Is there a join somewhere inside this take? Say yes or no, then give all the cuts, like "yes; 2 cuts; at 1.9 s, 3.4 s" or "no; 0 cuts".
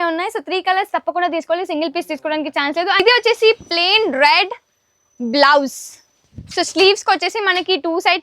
yes; 1 cut; at 3.0 s